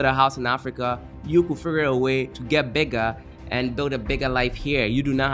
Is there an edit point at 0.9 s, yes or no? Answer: no